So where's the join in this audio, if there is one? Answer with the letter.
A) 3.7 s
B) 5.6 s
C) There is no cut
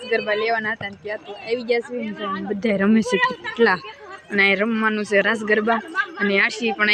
C